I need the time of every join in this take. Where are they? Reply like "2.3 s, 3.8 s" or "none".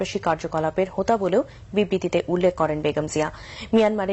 none